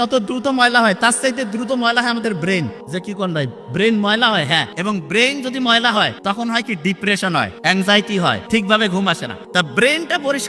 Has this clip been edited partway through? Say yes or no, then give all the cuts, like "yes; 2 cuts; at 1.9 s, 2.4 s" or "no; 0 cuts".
yes; 6 cuts; at 2.8 s, 4.7 s, 6.2 s, 7.5 s, 8.4 s, 9.3 s